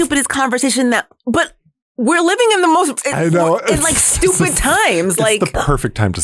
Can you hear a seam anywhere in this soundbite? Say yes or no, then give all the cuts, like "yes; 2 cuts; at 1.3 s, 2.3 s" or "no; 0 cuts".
yes; 1 cut; at 1.1 s